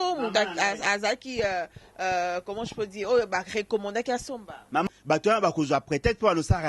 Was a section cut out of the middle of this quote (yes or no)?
yes